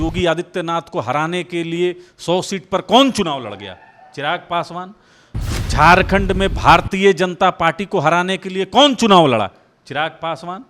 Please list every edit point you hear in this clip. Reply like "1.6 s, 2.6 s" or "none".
none

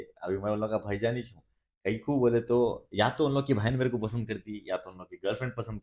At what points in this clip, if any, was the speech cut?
none

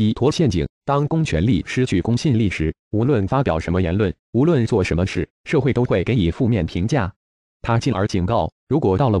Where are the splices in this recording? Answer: 2.8 s

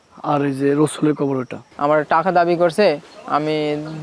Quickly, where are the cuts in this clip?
1.6 s

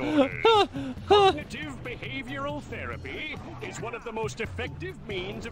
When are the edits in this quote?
none

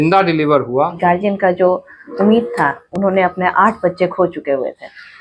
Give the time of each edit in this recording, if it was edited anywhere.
0.9 s

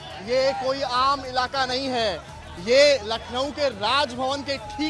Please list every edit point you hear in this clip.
none

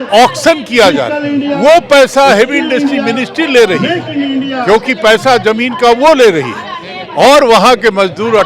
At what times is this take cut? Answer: none

